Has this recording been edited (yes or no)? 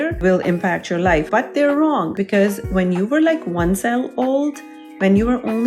yes